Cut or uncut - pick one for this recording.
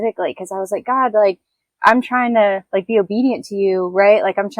cut